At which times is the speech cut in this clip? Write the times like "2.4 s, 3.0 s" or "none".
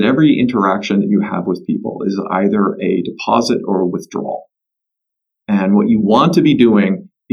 none

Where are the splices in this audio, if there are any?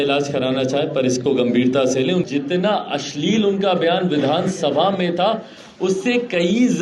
2.3 s

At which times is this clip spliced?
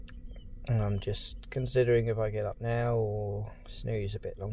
none

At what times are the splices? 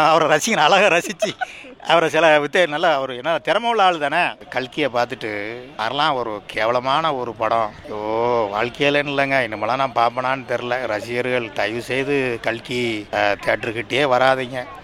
4.4 s

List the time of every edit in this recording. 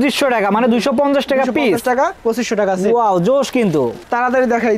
none

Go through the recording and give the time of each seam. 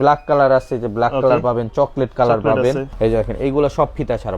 2.9 s

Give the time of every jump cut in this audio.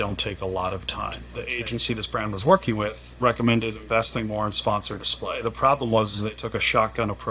1.2 s, 3.0 s

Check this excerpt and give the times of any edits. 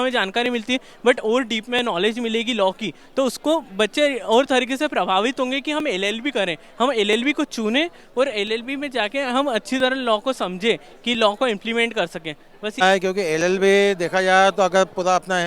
12.8 s

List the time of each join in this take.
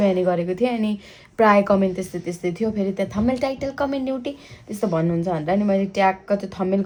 none

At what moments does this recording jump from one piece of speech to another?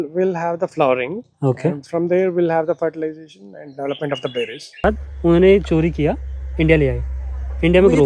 4.8 s

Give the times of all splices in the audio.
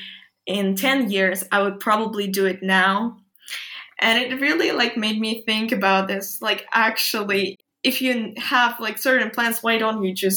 7.6 s

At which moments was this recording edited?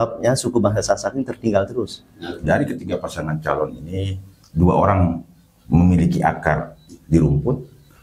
2.4 s

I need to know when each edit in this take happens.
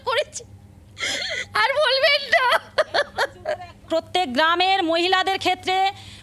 3.8 s

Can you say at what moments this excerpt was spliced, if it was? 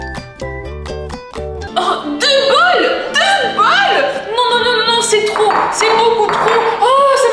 1.7 s

